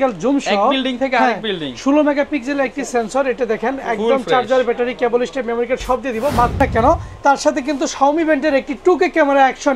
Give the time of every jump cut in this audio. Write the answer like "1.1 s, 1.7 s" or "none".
6.6 s